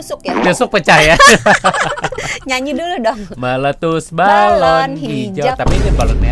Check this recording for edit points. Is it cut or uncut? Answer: uncut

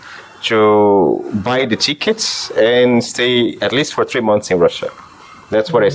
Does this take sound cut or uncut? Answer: uncut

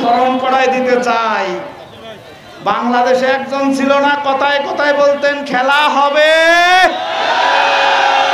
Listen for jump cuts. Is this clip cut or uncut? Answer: uncut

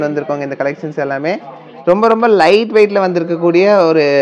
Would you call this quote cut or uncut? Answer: cut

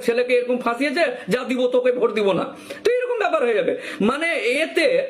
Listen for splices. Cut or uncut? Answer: uncut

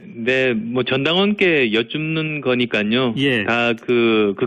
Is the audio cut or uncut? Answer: uncut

